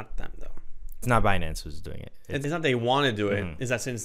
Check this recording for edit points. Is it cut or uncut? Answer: cut